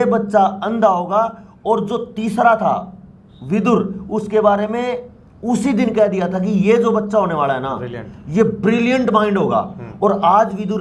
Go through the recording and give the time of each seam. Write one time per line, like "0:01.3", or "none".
none